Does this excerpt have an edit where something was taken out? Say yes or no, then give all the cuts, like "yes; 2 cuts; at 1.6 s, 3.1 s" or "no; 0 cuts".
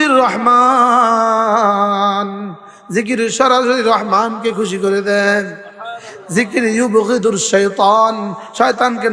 no; 0 cuts